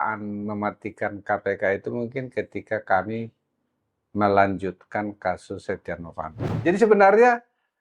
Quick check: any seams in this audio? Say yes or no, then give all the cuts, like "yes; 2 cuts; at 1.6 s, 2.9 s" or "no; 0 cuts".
yes; 1 cut; at 6.4 s